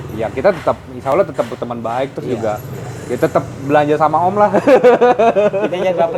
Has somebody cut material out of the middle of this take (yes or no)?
no